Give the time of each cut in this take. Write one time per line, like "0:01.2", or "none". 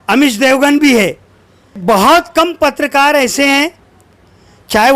0:01.8